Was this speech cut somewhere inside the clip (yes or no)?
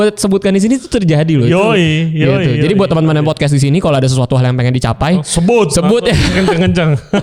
no